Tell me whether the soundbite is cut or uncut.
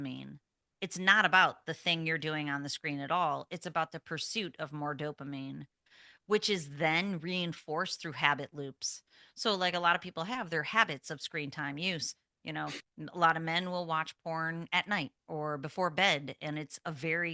uncut